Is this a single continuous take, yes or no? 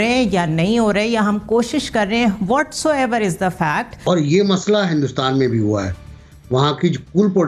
no